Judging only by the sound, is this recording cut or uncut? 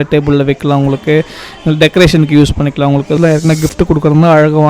cut